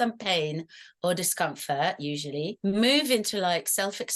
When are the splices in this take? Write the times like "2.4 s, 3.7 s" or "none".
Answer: 2.5 s

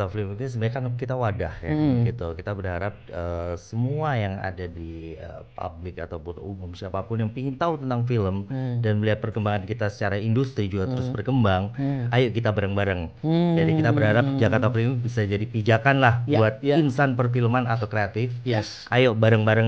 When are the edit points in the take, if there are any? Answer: none

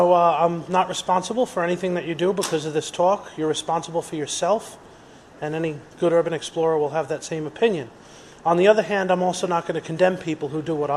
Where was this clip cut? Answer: none

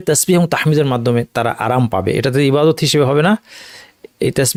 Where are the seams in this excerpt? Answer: none

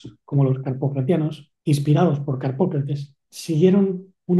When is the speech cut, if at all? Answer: 1.5 s

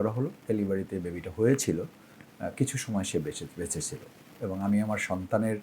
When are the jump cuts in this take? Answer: 4.4 s

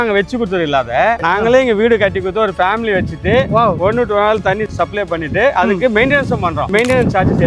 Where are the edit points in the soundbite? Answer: 1.2 s

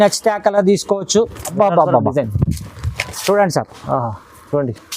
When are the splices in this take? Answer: 1.5 s

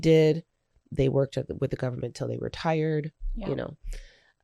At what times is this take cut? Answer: none

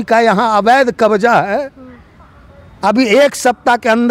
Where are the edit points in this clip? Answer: none

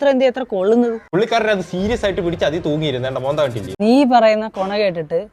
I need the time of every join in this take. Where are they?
1.0 s, 3.8 s

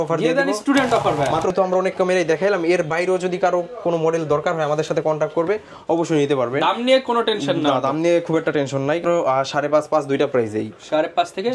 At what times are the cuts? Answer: 1.5 s, 9.0 s

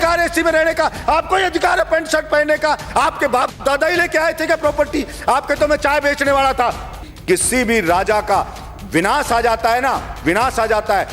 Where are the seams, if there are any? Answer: 7.1 s

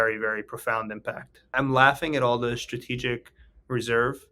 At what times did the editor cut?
1.5 s

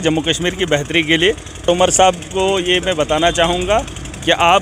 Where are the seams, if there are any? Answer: 1.7 s

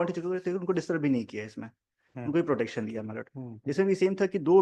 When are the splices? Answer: none

